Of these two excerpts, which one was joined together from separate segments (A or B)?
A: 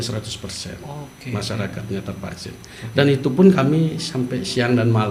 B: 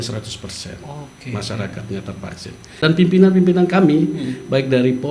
B